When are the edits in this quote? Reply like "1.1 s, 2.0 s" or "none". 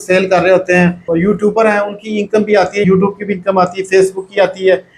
1.0 s, 2.8 s